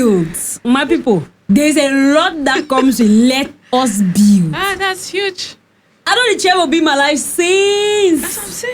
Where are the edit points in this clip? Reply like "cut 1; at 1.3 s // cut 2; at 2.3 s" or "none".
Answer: cut 1; at 1.3 s